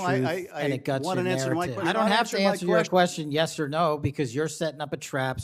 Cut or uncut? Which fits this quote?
cut